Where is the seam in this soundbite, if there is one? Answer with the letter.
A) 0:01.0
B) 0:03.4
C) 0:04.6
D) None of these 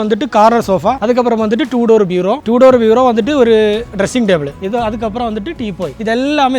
A